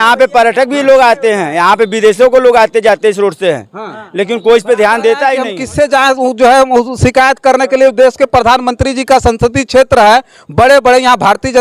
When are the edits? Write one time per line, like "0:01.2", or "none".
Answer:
0:05.6